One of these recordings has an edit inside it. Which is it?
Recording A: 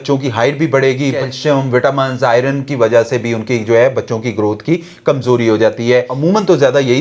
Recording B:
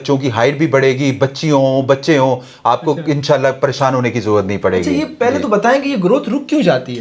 A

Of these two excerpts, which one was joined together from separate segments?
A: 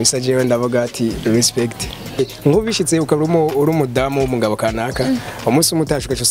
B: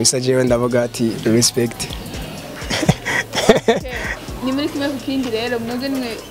A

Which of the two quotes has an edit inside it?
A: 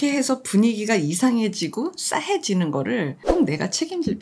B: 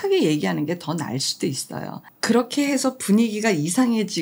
A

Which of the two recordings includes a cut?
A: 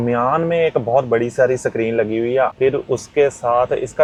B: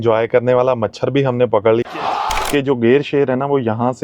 B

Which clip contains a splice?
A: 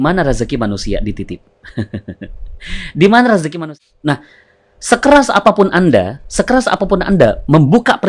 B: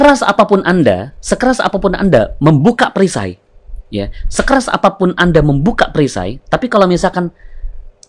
A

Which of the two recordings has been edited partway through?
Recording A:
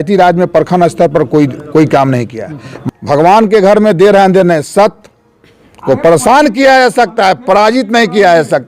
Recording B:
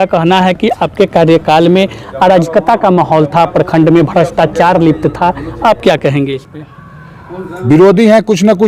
A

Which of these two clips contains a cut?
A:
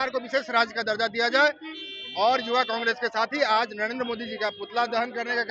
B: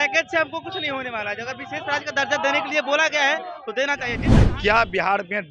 B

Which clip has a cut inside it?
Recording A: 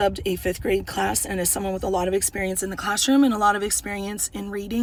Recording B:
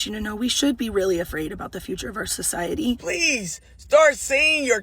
B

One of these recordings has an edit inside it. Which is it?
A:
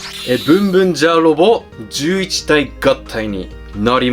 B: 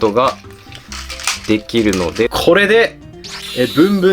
B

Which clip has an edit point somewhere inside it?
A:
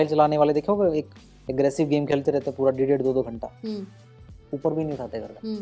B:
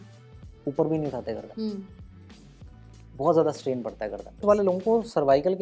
B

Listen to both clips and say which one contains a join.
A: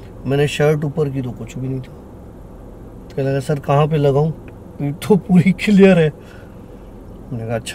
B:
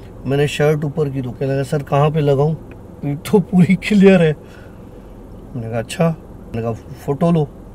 B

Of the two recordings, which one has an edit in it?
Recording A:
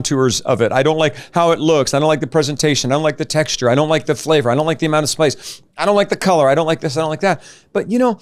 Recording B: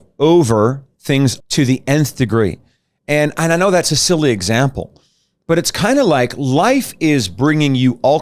B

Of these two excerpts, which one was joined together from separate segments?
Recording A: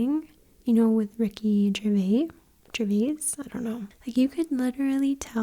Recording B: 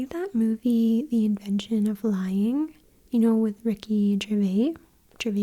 A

